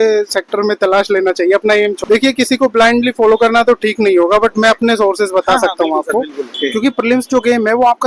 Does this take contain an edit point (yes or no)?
yes